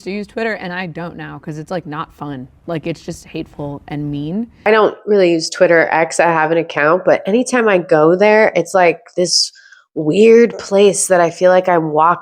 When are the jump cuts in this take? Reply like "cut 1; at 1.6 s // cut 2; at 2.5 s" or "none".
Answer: cut 1; at 4.5 s

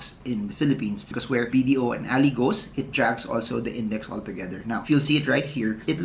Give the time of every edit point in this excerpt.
cut 1; at 1.2 s

